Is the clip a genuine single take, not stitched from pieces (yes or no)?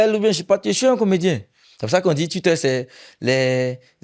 yes